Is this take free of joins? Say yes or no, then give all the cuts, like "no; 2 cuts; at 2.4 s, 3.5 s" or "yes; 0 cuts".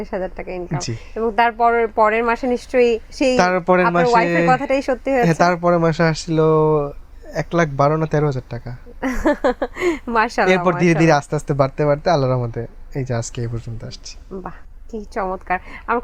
yes; 0 cuts